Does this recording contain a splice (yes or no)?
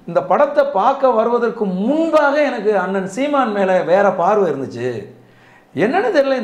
no